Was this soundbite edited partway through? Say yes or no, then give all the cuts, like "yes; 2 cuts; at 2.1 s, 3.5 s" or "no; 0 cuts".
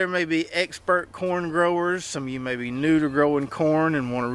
no; 0 cuts